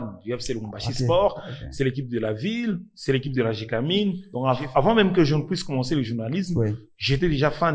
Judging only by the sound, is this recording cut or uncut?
cut